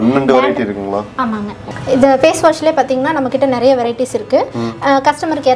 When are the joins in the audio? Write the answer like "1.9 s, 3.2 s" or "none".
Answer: 1.6 s